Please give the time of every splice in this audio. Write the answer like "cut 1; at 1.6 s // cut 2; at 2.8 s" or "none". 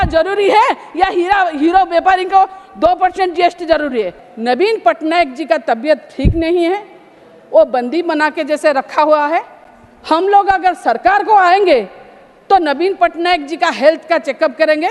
cut 1; at 4.2 s